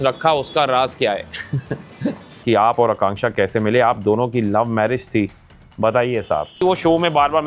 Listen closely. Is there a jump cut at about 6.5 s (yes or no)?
yes